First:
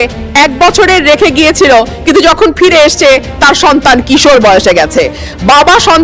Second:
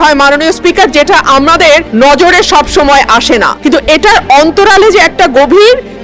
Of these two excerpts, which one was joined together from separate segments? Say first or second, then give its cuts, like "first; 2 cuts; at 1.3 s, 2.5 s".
second; 2 cuts; at 1.9 s, 3.5 s